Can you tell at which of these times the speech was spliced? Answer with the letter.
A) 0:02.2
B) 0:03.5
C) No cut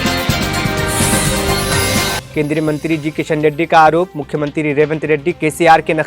A